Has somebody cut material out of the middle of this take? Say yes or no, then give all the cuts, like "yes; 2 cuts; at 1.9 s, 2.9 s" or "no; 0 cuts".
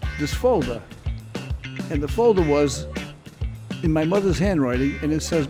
no; 0 cuts